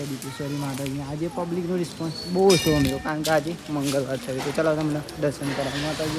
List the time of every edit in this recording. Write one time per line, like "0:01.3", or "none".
none